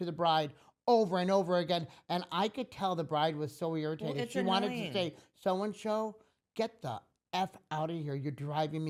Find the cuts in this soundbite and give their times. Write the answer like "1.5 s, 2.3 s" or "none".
none